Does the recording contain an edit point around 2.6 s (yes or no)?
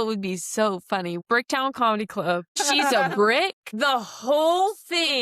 yes